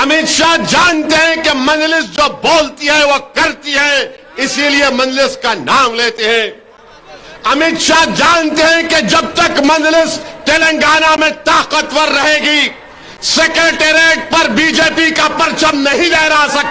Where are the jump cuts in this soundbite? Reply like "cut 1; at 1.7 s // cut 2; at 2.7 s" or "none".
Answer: none